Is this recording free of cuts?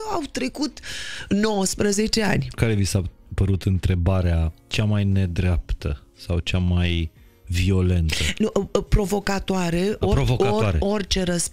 no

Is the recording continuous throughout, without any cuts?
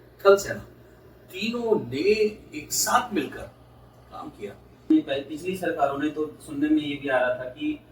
no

